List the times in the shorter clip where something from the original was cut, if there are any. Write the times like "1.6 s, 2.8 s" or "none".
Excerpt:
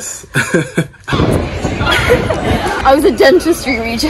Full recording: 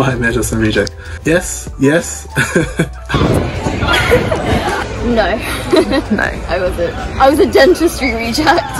2.8 s